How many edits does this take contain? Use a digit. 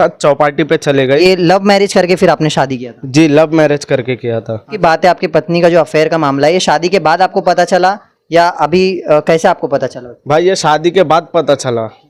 2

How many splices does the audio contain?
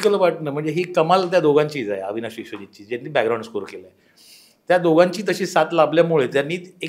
0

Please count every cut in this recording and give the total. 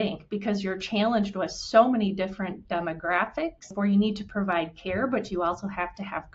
1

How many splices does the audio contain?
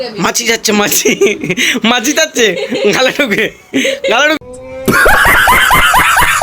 1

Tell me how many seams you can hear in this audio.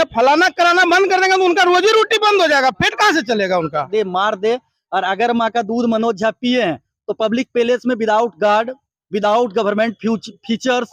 1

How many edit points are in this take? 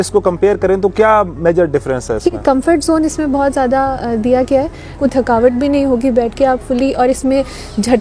2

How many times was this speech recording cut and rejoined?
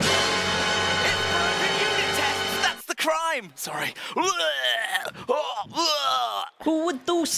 0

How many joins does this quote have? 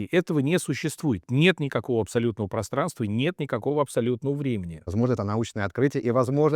1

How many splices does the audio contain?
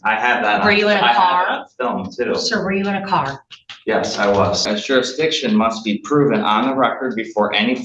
1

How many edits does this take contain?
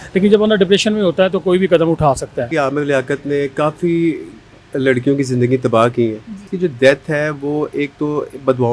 2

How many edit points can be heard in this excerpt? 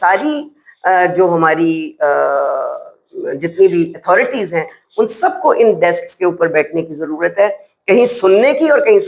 0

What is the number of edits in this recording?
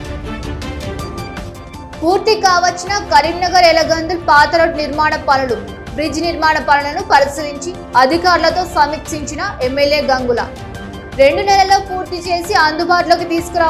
1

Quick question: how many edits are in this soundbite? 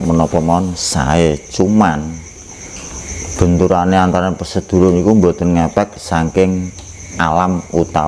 0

